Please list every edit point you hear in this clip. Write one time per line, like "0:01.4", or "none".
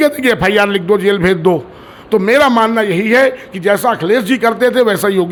none